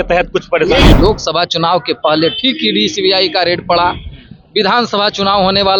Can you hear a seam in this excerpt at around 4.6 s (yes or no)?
no